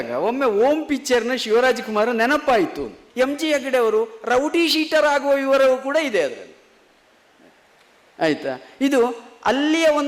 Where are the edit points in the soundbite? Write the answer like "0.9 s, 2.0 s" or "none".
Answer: 3.0 s